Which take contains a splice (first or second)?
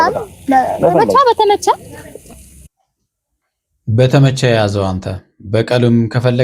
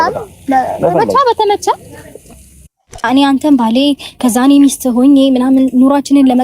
second